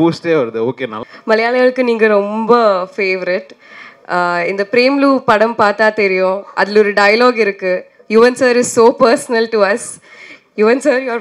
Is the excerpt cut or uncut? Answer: cut